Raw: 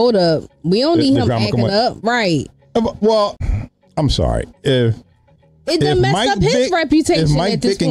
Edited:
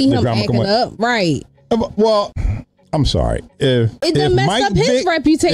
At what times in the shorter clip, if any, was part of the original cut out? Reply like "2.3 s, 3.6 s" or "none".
3.9 s

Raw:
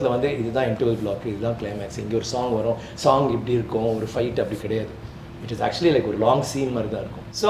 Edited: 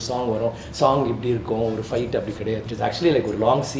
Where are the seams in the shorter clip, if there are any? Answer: 2.7 s

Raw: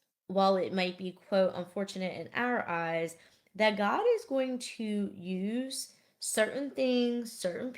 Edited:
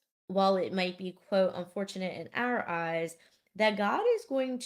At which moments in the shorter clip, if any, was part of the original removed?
none

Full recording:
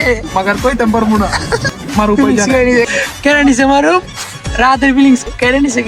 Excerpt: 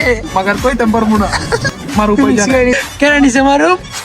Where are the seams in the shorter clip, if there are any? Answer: 2.7 s

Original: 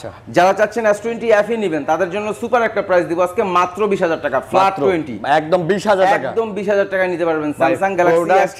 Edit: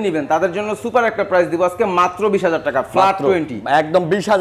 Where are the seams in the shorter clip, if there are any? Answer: none

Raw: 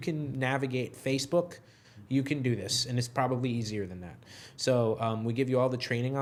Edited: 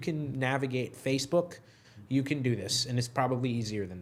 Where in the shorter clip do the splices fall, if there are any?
none

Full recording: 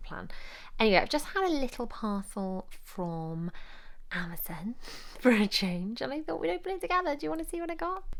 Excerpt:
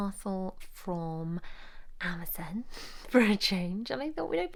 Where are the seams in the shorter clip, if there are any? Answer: none

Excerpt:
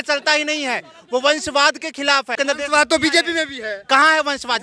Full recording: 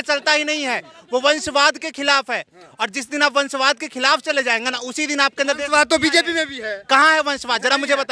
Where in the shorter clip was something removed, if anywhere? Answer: 2.3 s

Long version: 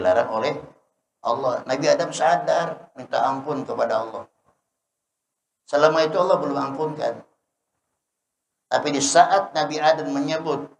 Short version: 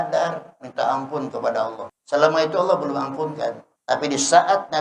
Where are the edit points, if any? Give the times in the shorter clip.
1.9 s, 3.7 s

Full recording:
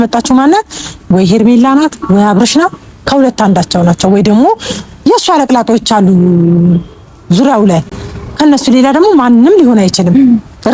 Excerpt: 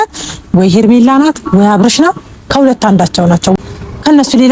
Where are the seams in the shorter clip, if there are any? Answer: 3.6 s

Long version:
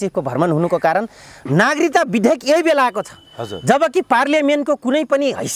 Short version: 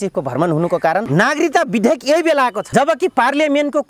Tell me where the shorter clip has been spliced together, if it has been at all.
1.1 s, 2.6 s

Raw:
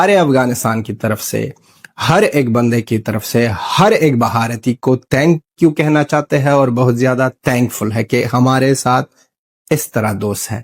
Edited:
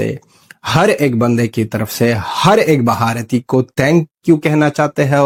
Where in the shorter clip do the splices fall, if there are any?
none

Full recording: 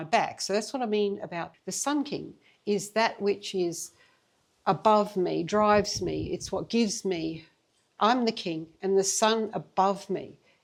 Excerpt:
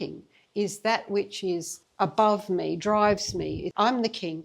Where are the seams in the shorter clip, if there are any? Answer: 1.8 s, 3.7 s

